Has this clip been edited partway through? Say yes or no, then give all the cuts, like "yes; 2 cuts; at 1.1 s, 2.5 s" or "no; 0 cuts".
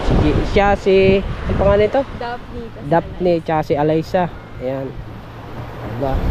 no; 0 cuts